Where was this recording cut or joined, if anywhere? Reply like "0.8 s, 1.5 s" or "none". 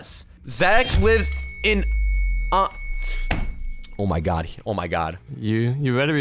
5.2 s